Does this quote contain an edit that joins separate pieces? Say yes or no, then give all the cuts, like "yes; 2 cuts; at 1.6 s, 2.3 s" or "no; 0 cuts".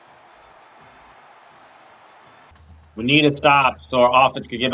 yes; 1 cut; at 2.5 s